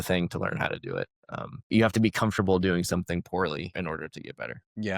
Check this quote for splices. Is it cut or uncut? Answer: cut